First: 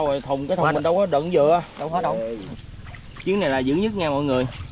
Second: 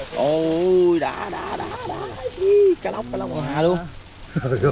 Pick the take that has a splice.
first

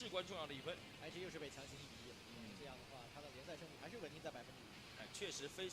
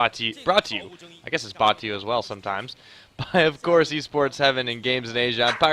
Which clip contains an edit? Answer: second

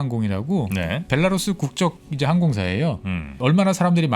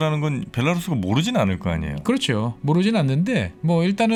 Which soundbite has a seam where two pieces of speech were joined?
first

